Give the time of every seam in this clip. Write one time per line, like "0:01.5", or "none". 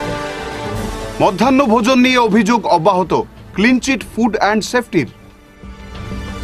0:00.9